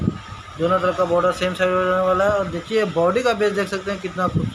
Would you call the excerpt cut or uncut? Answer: uncut